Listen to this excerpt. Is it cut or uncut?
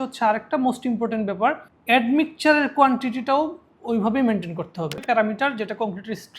cut